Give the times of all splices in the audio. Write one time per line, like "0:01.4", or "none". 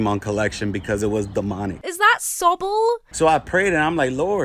0:01.8
0:03.0

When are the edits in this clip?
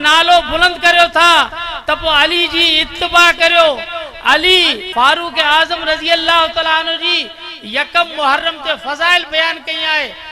0:04.8

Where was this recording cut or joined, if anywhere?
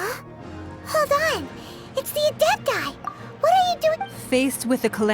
0:04.0

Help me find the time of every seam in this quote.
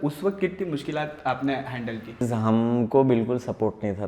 0:02.3

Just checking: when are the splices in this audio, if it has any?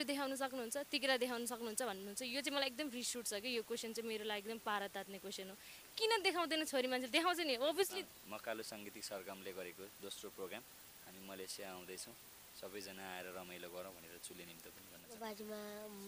0:08.0
0:15.2

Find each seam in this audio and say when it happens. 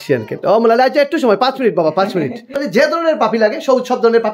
0:02.6

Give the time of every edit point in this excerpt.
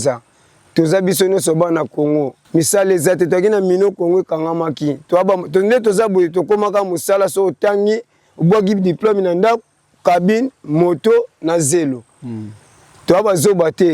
0:02.4

